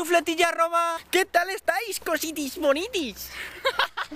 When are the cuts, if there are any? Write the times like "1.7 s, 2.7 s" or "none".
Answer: 1.0 s